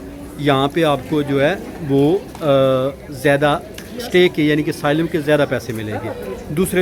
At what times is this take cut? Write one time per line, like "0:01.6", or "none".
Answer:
none